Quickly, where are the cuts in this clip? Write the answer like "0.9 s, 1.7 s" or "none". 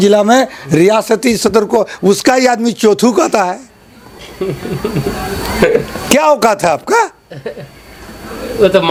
none